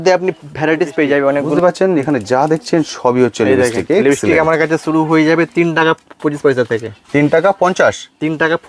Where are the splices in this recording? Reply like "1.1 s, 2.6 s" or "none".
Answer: 1.5 s